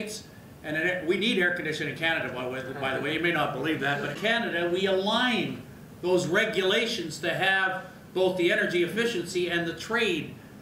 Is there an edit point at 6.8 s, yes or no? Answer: no